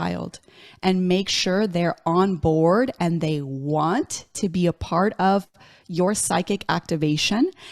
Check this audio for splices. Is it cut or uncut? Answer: uncut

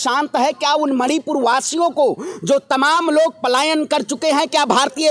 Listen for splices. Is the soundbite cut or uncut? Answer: uncut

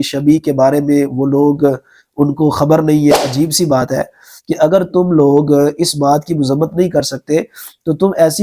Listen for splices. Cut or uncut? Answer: cut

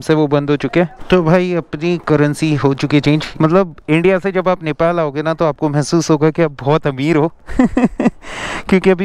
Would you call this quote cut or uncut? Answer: cut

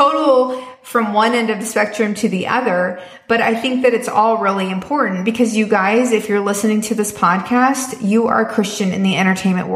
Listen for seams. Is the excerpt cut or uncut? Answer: uncut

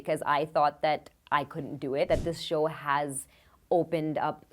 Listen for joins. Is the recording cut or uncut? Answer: cut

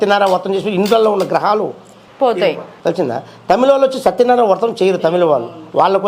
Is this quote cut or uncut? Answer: uncut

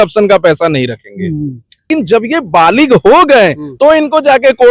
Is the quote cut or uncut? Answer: cut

